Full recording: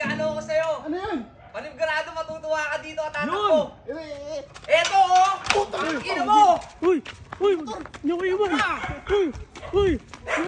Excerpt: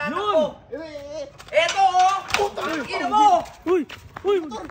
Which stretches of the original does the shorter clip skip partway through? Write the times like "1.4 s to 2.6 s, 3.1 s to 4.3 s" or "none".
none

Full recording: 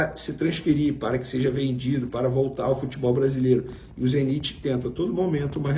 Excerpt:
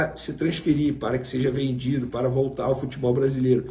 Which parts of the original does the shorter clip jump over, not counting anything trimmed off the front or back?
none

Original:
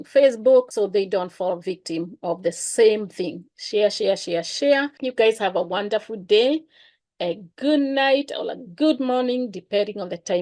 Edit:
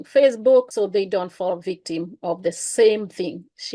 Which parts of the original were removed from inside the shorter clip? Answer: none

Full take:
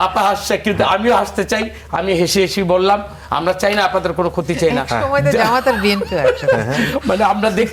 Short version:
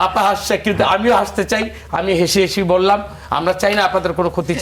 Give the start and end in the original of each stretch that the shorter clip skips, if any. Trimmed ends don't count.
none

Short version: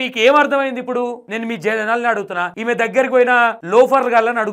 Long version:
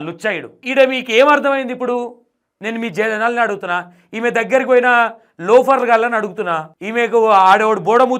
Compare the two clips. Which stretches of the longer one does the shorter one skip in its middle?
2.2 s to 2.6 s, 3.9 s to 4.1 s, 5.2 s to 5.4 s

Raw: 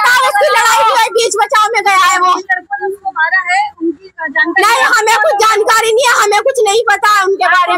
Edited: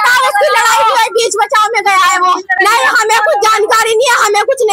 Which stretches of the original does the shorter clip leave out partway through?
2.6 s to 4.5 s

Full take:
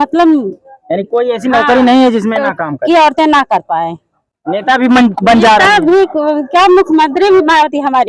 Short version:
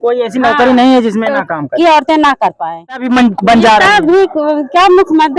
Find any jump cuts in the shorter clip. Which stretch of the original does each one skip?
4.1 s to 4.8 s

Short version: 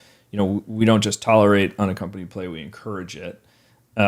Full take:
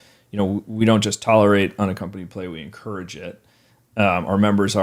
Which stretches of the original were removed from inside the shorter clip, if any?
none

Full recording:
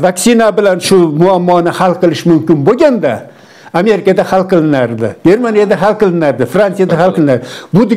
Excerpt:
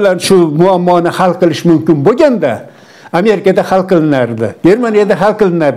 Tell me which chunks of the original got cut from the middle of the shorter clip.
none

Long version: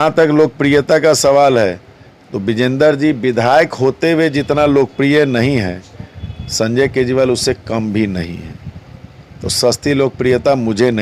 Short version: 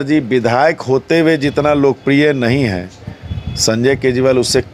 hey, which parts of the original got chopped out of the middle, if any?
none

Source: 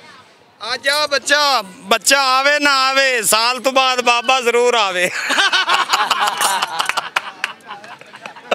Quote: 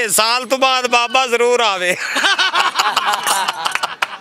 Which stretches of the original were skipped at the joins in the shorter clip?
none

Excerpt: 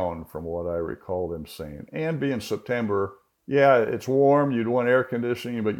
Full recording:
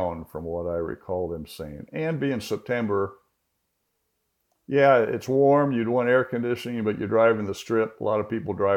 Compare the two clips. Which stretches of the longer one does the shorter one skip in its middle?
3.3 s to 4.5 s

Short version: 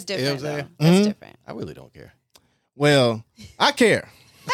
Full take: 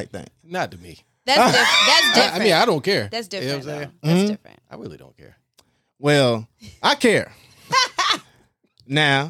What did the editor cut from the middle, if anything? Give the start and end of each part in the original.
none

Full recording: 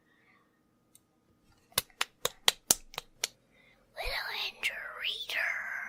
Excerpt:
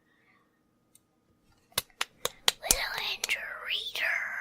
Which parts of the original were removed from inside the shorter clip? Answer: 2.6 s to 3.9 s

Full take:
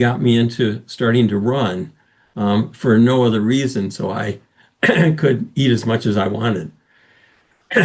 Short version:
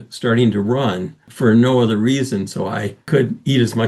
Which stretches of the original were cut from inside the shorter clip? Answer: 2.1 s to 2.7 s, 4.5 s to 5.2 s

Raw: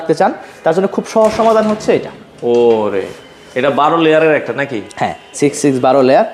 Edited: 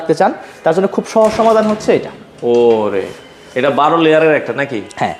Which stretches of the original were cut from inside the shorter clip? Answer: none

